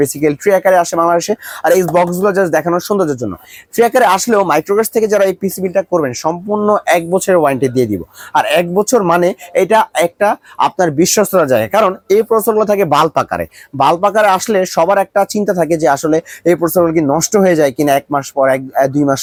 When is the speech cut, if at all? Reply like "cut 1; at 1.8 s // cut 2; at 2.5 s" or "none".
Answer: none

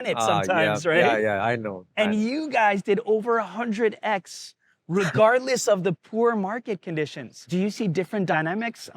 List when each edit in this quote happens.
cut 1; at 7.5 s

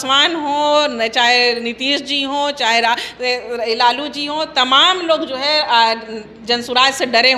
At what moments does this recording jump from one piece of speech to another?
none

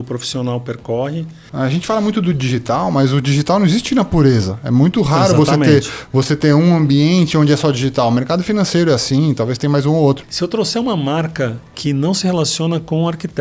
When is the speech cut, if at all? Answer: cut 1; at 1.4 s // cut 2; at 10.3 s

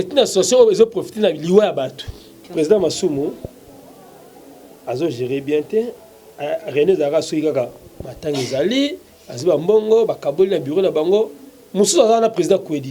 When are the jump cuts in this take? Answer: cut 1; at 2.4 s

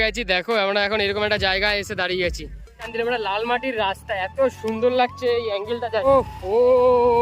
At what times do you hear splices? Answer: cut 1; at 2.8 s // cut 2; at 6.0 s

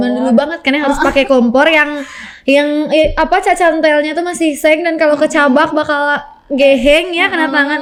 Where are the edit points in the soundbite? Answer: none

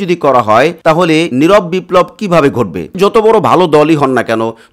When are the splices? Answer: cut 1; at 1.1 s // cut 2; at 2.9 s

